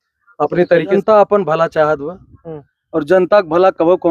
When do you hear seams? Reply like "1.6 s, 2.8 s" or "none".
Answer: 0.9 s